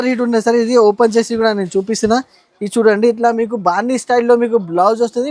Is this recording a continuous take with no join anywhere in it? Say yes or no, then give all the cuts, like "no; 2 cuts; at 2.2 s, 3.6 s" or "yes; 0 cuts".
yes; 0 cuts